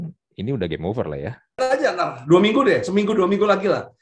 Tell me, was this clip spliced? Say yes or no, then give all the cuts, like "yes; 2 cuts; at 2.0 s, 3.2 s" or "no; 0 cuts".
yes; 1 cut; at 1.6 s